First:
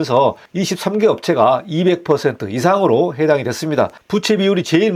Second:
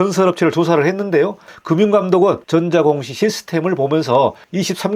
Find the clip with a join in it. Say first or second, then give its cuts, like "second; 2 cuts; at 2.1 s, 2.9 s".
second; 2 cuts; at 1.5 s, 2.4 s